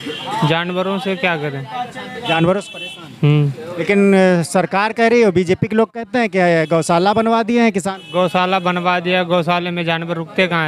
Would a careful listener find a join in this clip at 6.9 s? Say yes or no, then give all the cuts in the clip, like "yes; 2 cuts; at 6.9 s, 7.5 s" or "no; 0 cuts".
no; 0 cuts